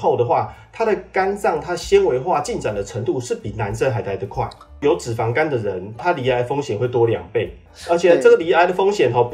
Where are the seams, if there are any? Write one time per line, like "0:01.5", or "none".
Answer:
0:04.8
0:06.0